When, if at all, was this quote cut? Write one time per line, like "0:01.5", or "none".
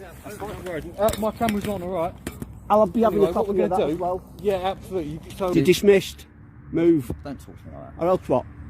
0:05.5